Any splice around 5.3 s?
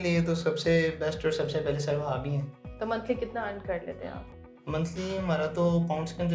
no; 1 cut; at 2.6 s

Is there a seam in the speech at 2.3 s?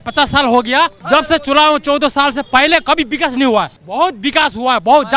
no; 2 cuts; at 1.0 s, 3.8 s

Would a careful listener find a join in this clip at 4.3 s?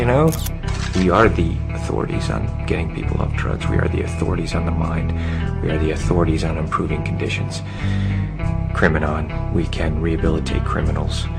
yes; 1 cut; at 4.3 s

